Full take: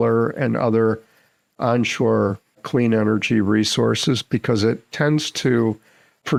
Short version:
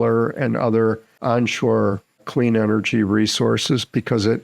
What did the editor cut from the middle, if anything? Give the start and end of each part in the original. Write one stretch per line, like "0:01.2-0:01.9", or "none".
0:01.1-0:01.5

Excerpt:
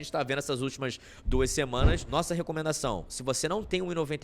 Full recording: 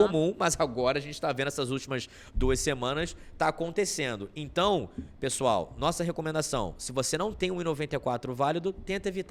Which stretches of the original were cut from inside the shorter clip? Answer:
0:03.1-0:05.7

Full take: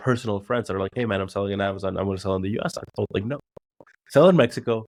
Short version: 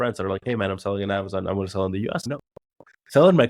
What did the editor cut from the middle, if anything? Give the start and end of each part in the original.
0:02.8-0:03.3

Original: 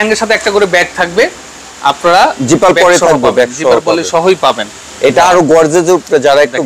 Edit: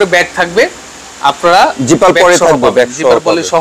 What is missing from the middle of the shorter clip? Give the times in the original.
none

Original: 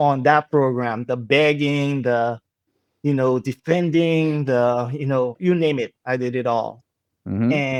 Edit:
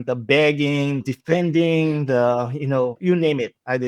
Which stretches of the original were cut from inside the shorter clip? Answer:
0:02.0-0:03.4

